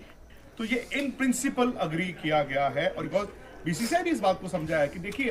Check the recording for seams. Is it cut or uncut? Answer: cut